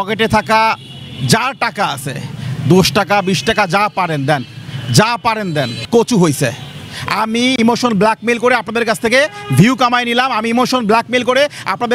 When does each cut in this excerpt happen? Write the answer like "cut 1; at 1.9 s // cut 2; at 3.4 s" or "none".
cut 1; at 5.9 s

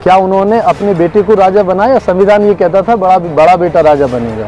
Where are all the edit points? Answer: none

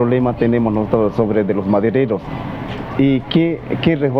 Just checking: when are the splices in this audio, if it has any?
none

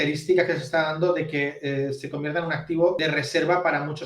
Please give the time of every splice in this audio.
cut 1; at 3.0 s

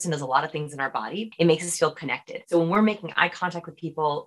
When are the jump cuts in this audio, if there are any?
cut 1; at 1.2 s // cut 2; at 2.3 s

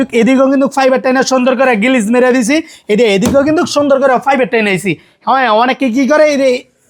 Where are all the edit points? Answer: none

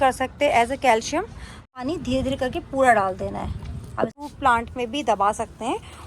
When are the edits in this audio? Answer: cut 1; at 1.8 s // cut 2; at 4.1 s

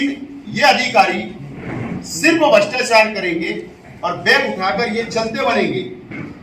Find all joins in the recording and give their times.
none

